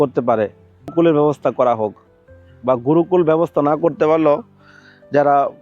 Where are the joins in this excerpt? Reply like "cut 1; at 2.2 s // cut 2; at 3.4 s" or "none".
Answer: cut 1; at 0.9 s